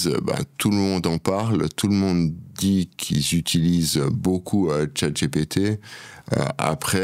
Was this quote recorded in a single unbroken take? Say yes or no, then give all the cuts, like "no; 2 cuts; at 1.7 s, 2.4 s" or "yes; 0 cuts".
yes; 0 cuts